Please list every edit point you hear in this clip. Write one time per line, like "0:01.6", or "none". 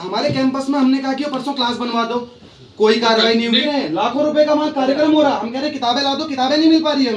0:03.6